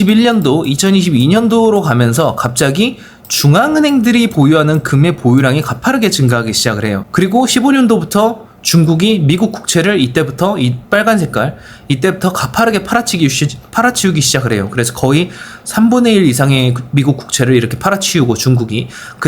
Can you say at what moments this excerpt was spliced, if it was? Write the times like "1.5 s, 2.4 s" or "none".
7.1 s